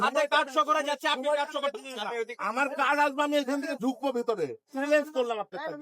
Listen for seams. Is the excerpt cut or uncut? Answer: cut